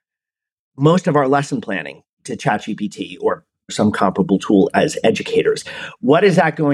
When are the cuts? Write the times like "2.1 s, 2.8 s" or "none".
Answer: 3.7 s